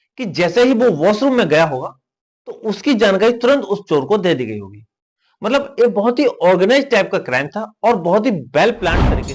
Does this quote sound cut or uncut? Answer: uncut